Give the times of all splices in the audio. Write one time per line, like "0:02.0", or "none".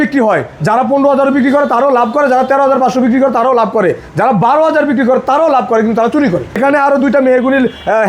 0:06.6

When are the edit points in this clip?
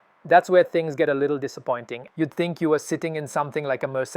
0:02.0

